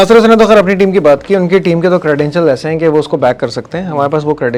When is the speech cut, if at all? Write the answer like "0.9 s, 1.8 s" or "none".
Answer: none

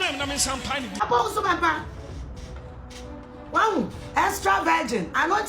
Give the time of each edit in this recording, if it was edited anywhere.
1.0 s

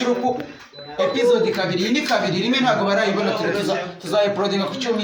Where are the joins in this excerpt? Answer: none

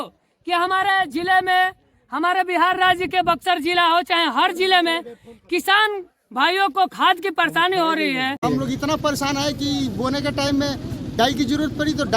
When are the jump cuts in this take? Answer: 8.4 s

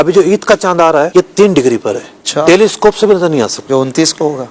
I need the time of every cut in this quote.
1.1 s, 3.6 s

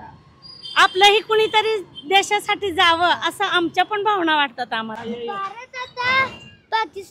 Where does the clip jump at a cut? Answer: 4.9 s

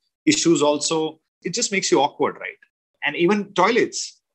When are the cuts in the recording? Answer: 1.4 s, 3.0 s

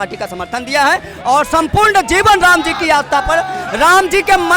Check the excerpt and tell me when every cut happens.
none

